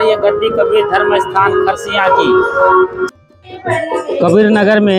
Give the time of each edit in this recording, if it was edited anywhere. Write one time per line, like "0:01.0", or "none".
0:03.0

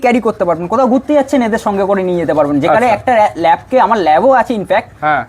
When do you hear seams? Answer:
none

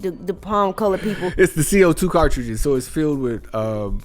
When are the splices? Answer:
0:01.3

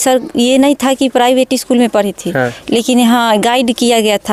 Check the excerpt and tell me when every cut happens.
none

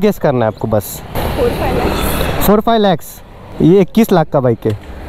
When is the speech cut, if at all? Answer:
0:01.2
0:03.4

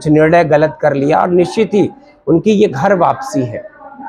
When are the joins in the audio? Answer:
none

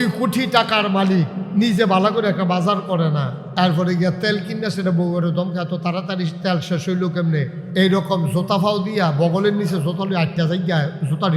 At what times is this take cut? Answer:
0:01.4
0:03.4
0:07.6

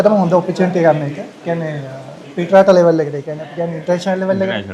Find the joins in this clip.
none

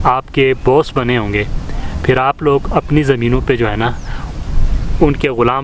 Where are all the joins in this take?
none

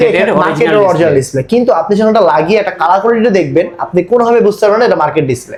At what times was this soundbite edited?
none

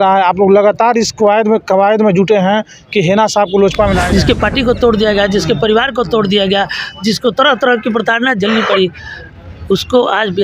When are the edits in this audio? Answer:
0:04.0

